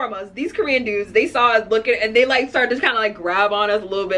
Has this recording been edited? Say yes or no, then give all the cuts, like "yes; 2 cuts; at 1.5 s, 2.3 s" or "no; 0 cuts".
no; 0 cuts